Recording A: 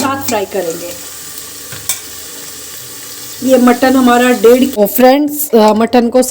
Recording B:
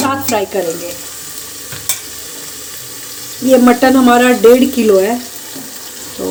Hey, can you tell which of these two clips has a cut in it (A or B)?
A